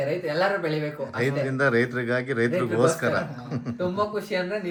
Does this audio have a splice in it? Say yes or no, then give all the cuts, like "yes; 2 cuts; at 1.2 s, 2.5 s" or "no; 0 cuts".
no; 0 cuts